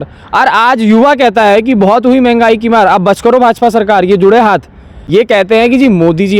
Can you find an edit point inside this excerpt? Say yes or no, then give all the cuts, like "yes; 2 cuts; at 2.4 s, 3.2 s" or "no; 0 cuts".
yes; 1 cut; at 4.9 s